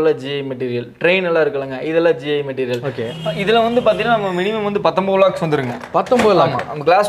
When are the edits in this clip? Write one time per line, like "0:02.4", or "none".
0:03.0